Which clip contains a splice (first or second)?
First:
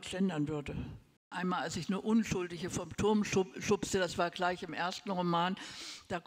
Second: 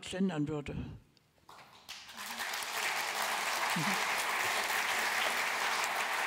first